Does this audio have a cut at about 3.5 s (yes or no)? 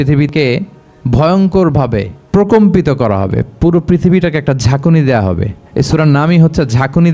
no